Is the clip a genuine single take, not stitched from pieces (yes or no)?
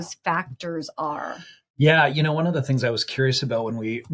yes